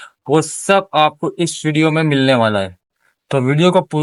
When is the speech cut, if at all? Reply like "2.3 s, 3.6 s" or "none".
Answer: none